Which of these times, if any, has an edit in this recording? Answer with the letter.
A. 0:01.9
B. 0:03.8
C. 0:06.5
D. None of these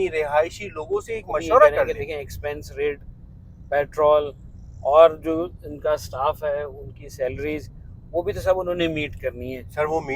A